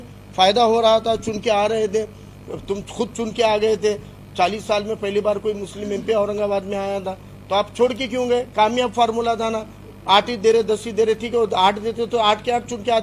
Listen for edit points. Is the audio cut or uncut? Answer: uncut